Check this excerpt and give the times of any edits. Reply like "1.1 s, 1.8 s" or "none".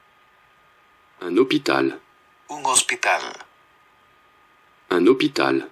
3.6 s